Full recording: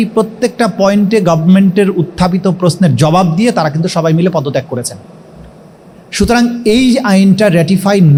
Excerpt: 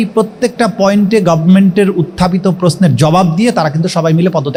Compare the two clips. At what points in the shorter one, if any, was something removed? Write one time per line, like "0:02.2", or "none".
none